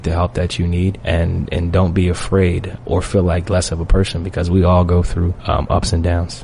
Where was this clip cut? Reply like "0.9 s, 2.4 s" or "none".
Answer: 1.0 s, 2.7 s, 5.4 s